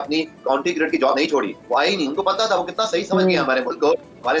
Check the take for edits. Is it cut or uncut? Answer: uncut